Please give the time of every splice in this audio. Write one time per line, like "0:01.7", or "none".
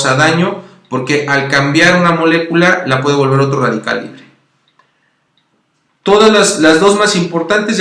0:04.8